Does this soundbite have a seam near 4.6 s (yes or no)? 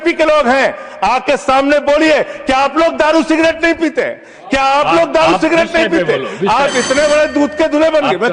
no